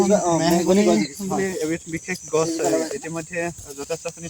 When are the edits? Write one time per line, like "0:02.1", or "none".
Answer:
none